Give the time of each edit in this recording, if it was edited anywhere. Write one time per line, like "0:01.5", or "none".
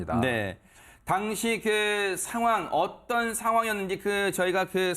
0:03.6